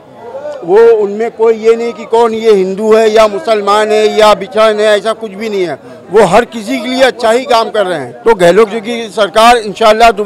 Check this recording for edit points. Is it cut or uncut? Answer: uncut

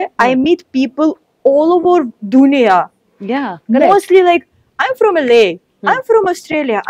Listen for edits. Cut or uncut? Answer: uncut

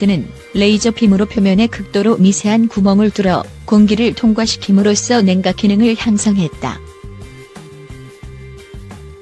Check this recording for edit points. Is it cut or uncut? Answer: cut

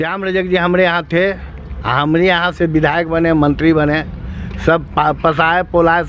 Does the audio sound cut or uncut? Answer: uncut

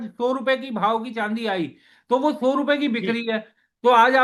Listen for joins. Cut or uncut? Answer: uncut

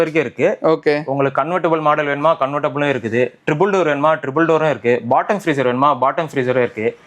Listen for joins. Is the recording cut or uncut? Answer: uncut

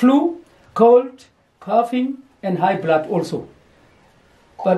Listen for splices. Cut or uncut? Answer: uncut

